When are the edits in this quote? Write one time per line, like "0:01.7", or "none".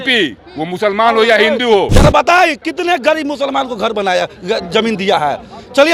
0:01.9